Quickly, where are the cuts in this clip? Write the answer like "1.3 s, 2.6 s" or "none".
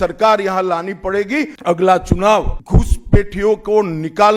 1.5 s, 2.6 s

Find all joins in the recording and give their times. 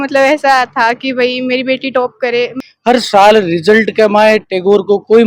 2.6 s

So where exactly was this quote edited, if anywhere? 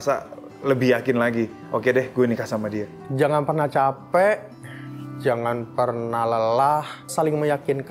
3.0 s

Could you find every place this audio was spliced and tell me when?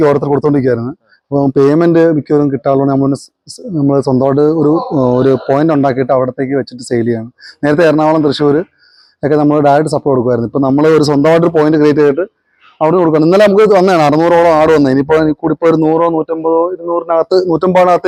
none

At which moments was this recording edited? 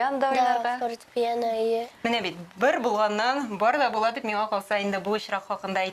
none

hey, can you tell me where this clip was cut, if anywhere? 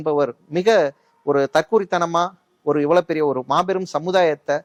none

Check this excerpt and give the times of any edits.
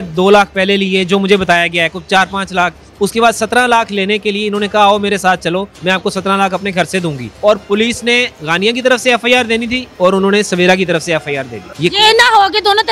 2.8 s, 5.7 s, 7.2 s, 9.8 s, 11.6 s

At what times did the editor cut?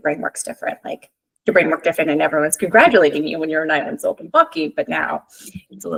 none

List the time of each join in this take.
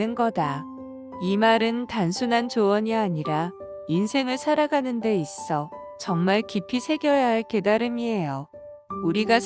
0.9 s

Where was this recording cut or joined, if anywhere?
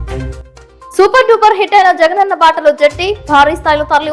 none

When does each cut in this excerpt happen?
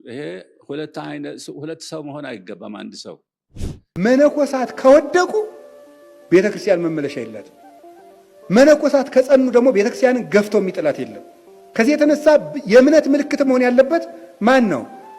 3.9 s

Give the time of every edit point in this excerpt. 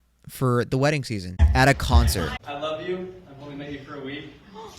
1.4 s, 2.4 s

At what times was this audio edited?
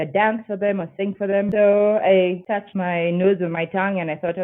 1.5 s, 2.7 s

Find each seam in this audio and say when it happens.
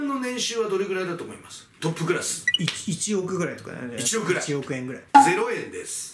1.6 s, 5.0 s

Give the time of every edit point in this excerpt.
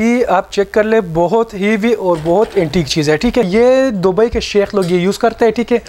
3.5 s

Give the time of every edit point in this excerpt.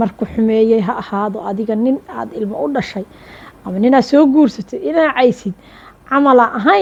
none

